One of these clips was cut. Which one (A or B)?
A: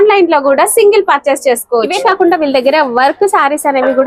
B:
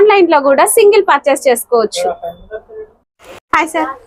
A